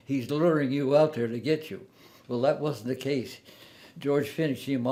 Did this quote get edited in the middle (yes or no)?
no